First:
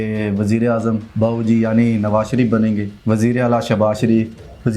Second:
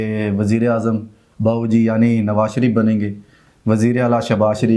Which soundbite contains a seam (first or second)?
first